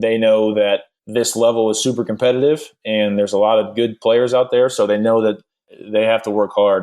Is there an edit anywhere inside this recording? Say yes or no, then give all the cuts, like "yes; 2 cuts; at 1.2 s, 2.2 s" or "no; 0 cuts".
yes; 2 cuts; at 1.0 s, 5.7 s